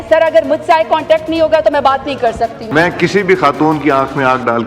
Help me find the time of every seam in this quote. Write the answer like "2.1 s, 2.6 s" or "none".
2.5 s

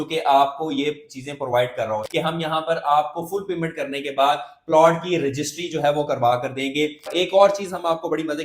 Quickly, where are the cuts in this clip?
2.1 s, 7.1 s

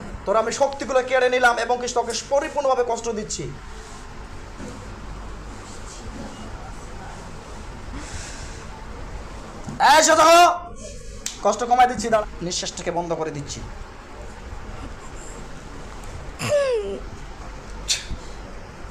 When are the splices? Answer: 12.2 s

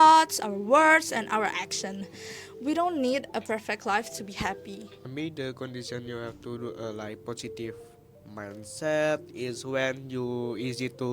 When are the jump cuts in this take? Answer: 5.0 s

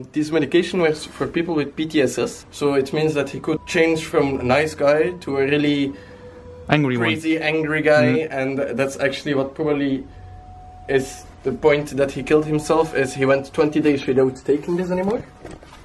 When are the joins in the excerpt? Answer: 2.4 s, 3.6 s

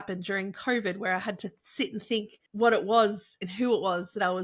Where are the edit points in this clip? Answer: 2.4 s

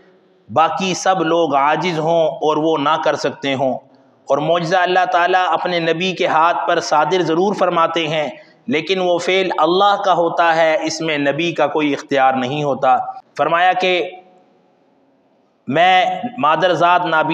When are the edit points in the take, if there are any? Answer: 13.2 s

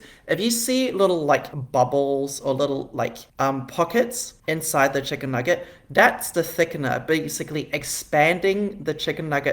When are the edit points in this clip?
1.6 s, 3.2 s, 4.3 s

